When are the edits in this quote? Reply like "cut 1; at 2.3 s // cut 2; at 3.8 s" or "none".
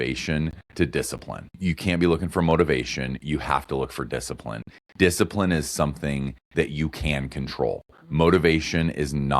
cut 1; at 1.5 s